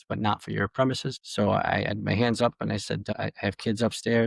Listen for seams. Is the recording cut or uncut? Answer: cut